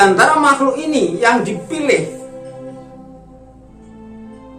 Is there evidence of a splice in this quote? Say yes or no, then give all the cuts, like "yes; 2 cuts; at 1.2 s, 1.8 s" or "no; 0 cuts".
yes; 2 cuts; at 2.1 s, 3.4 s